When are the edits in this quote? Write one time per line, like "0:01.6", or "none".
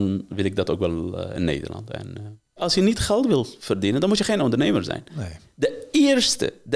0:02.6